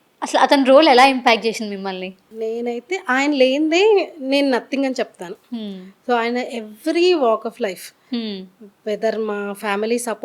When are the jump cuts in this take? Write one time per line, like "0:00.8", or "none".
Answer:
0:02.2

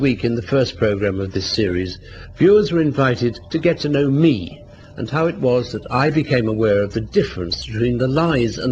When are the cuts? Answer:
0:04.2

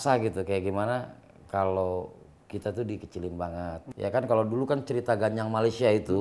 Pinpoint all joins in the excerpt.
0:03.8

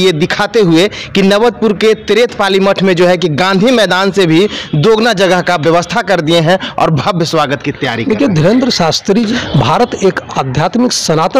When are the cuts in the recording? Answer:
0:09.3

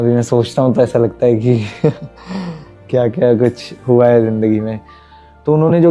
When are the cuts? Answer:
0:04.8

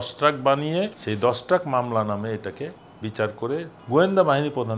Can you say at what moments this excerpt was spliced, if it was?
0:01.0
0:02.8
0:03.8

